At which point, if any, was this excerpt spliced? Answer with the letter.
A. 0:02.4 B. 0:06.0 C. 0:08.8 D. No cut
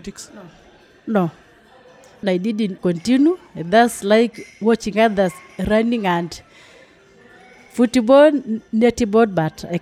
A